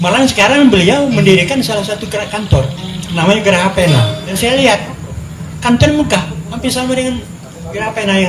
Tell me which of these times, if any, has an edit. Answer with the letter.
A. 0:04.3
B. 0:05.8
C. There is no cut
A